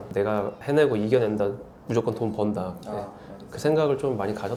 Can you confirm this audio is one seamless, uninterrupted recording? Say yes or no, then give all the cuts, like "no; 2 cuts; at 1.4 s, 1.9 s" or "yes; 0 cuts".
yes; 0 cuts